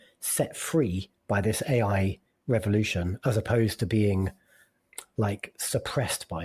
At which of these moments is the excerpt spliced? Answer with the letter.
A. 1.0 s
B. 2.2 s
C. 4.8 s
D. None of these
C